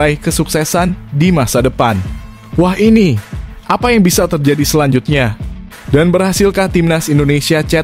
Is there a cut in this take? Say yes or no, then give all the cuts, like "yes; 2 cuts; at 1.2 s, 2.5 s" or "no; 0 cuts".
no; 0 cuts